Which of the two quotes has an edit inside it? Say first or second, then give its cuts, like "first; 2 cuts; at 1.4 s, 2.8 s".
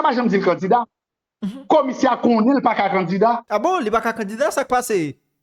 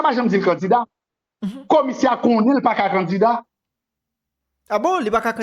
first; 1 cut; at 3.4 s